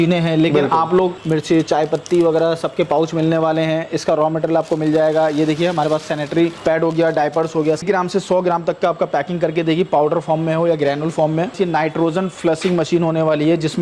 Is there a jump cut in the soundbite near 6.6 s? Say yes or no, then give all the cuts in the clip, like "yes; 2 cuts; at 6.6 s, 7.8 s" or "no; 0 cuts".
yes; 4 cuts; at 1.2 s, 6.6 s, 7.8 s, 11.6 s